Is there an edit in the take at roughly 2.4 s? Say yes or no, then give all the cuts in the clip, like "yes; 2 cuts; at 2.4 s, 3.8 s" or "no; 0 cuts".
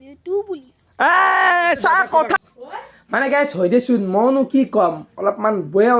yes; 1 cut; at 2.4 s